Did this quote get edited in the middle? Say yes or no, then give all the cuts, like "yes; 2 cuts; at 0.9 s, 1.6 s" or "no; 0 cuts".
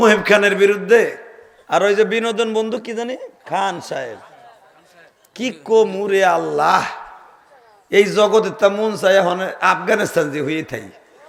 no; 0 cuts